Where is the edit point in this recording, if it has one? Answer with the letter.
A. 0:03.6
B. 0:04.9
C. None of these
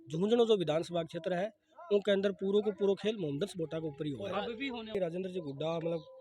B